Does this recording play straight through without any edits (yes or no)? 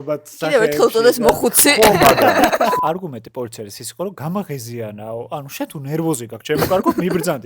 no